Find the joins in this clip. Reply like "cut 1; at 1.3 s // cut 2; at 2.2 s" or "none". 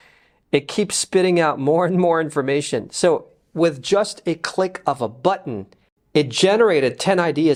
none